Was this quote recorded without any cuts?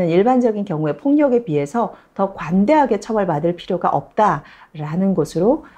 yes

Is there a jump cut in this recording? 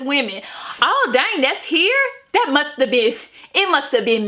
no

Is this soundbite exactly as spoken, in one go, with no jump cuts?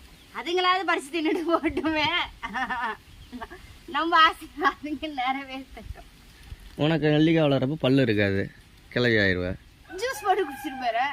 yes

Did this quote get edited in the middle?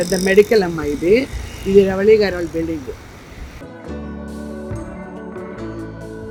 no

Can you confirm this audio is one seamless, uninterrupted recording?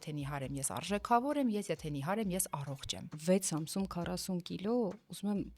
no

